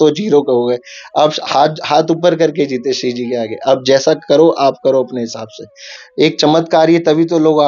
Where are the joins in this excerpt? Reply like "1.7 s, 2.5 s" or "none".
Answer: 5.9 s